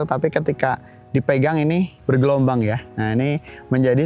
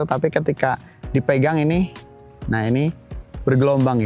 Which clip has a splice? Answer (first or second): first